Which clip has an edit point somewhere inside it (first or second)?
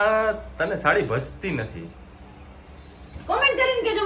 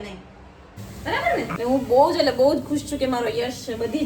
second